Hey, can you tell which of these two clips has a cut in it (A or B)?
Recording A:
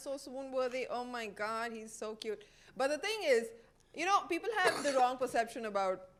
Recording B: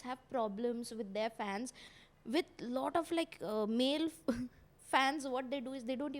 B